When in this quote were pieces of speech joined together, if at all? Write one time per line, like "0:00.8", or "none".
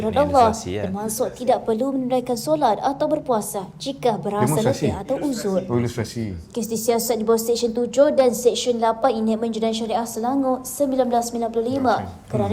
none